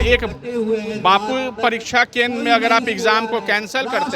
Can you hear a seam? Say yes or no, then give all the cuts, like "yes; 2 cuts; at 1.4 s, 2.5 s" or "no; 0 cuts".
no; 0 cuts